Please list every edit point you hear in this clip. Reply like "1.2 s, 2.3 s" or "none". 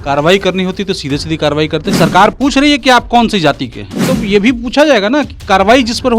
2.0 s, 4.1 s